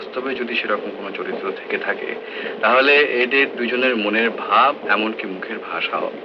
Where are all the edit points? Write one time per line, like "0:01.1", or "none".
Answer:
none